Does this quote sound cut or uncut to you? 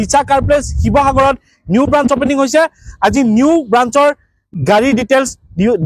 uncut